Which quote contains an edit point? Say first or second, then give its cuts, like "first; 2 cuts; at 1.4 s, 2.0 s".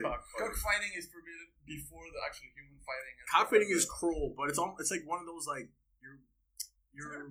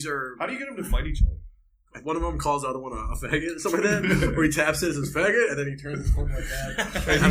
second; 1 cut; at 1.9 s